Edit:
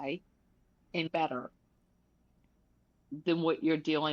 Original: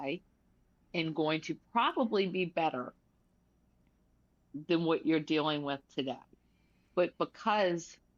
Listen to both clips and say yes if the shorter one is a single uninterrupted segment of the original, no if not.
no